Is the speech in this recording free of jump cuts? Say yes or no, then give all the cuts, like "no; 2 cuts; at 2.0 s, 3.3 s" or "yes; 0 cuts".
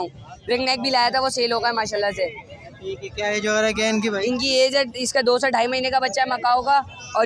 yes; 0 cuts